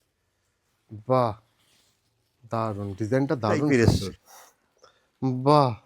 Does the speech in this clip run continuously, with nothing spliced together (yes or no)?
no